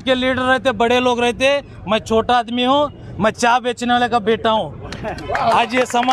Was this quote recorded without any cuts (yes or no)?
yes